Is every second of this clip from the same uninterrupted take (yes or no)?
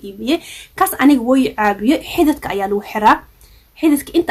yes